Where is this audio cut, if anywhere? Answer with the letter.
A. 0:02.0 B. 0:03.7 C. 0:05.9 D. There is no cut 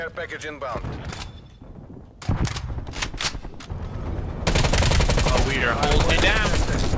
B